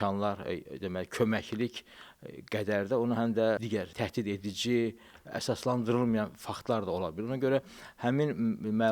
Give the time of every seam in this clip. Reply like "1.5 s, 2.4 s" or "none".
3.6 s